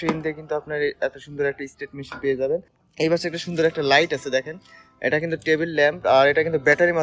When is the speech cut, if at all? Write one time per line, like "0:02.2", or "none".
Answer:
0:02.8